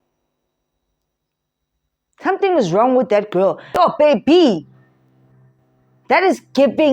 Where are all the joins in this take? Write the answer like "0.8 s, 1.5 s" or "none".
3.6 s